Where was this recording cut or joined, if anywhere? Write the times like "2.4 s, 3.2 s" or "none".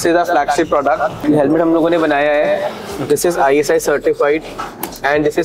1.2 s